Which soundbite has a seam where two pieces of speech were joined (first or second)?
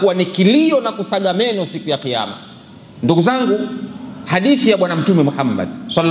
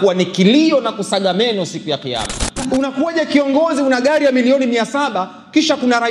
second